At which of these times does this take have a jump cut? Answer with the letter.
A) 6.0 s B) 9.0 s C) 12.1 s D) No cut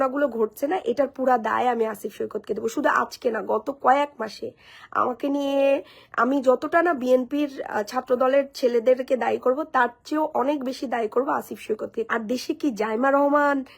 C